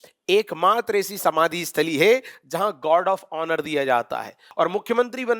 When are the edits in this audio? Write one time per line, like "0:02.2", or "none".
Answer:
0:04.4